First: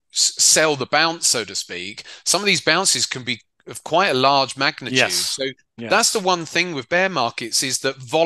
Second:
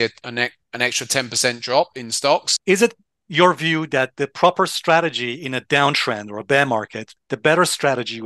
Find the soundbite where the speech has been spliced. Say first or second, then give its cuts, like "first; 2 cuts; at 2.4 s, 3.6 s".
second; 2 cuts; at 2.5 s, 7.2 s